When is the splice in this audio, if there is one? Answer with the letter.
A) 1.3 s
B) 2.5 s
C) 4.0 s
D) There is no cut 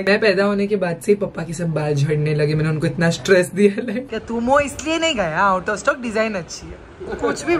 C